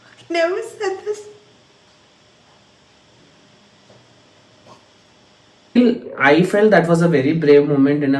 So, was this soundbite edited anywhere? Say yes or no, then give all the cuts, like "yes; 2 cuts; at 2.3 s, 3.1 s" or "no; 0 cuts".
no; 0 cuts